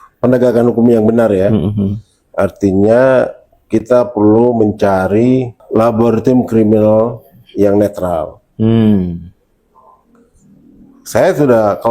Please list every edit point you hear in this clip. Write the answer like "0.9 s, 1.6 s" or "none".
5.6 s